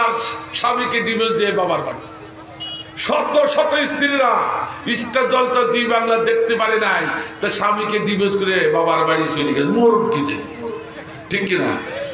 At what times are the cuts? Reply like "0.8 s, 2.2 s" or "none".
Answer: none